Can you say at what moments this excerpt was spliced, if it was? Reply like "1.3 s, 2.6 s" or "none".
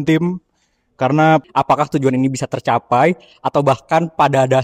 1.4 s